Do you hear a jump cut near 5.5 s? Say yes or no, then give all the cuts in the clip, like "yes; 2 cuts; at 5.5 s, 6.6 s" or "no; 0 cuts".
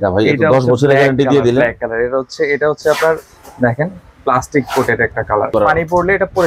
yes; 1 cut; at 5.5 s